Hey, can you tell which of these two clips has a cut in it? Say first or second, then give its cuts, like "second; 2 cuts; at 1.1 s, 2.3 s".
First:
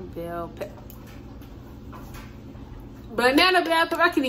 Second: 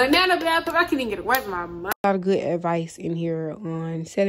second; 1 cut; at 2.0 s